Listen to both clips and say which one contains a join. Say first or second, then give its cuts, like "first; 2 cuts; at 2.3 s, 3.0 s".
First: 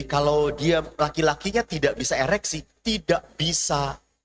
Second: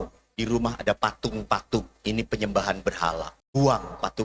second; 1 cut; at 3.3 s